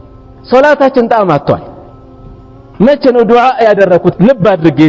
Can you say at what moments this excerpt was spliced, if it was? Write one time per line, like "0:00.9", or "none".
none

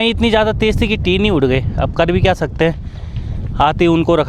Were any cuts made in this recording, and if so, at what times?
none

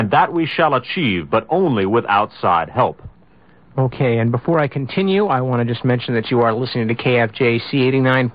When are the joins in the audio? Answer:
0:02.7

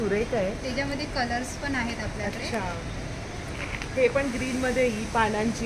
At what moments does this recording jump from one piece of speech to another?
none

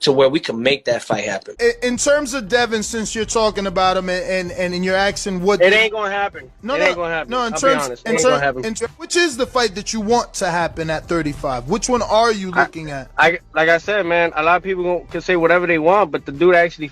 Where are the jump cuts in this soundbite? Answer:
0:01.5

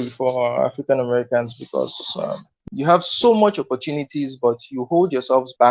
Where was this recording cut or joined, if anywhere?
0:02.5

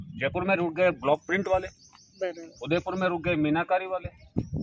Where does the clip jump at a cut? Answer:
none

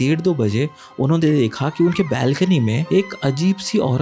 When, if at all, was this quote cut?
0:02.8

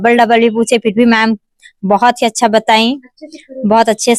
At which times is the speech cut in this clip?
none

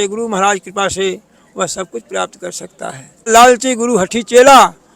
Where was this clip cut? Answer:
0:03.3

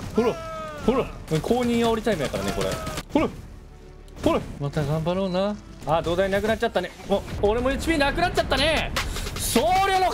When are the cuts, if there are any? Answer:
0:01.2
0:03.0
0:04.5
0:05.7
0:07.3

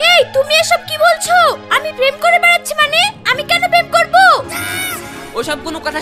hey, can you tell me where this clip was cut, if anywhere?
none

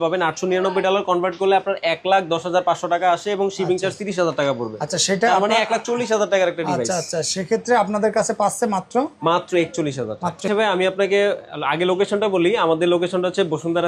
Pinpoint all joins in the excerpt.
0:10.4

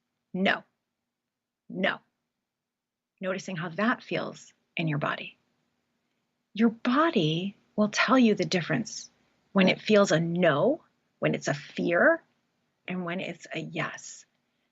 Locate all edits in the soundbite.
0:12.8

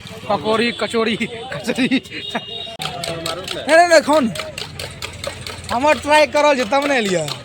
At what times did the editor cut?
0:03.0

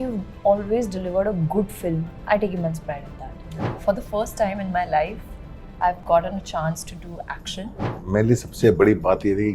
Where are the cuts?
0:02.1
0:03.8
0:08.0

